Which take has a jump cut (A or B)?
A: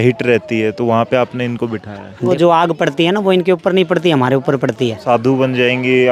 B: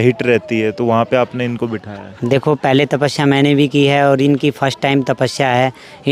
A